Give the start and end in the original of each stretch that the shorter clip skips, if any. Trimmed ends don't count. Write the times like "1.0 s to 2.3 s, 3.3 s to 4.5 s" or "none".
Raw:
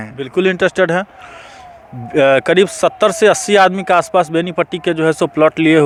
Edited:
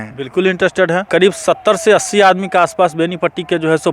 1.1 s to 2.4 s